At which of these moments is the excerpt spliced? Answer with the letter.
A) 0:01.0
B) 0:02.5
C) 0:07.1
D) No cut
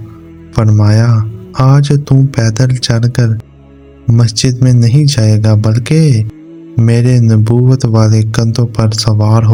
D